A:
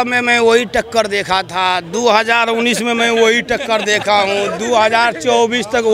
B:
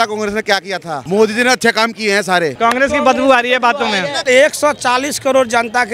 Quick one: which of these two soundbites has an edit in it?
B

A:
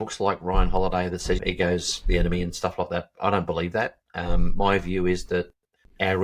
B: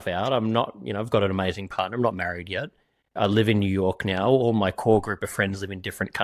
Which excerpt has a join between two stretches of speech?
A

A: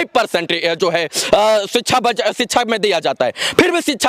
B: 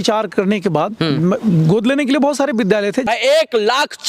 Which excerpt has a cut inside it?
B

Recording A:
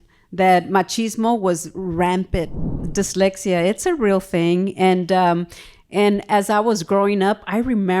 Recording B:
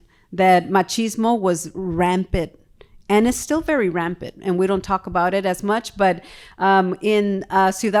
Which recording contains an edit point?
A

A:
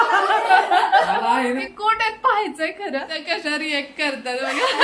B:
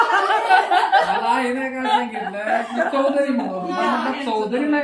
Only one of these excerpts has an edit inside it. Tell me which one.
A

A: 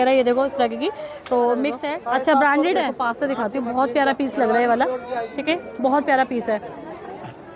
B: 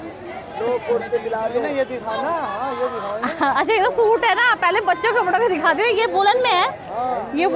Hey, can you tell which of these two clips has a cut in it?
A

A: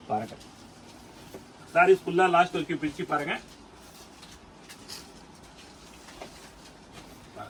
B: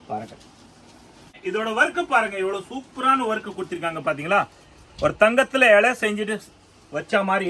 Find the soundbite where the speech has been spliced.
B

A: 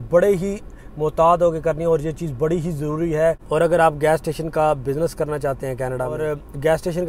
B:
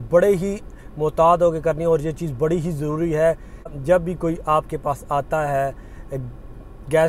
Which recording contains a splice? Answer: A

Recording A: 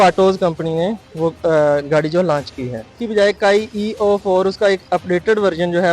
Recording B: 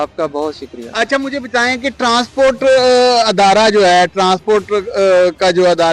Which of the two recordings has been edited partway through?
A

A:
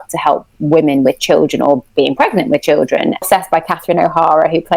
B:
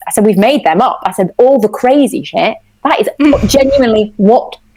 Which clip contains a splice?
A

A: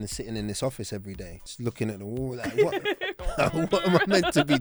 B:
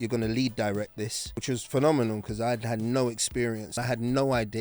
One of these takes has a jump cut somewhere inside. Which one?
B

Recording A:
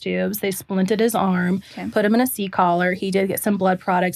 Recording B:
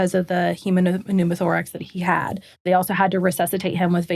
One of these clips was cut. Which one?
B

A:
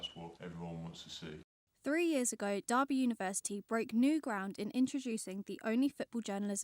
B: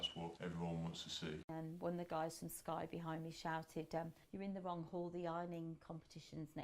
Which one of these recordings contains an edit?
B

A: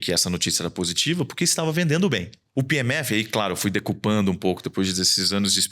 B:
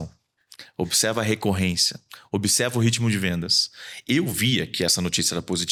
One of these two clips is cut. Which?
A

